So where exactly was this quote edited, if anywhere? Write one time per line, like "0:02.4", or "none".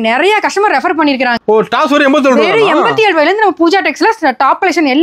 0:01.4